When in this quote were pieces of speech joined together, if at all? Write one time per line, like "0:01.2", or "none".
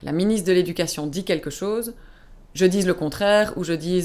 none